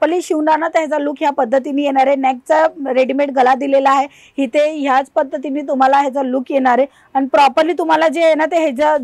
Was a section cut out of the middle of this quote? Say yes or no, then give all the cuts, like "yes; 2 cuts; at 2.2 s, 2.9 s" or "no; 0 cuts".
no; 0 cuts